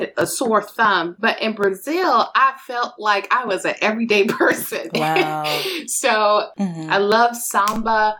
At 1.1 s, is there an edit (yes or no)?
yes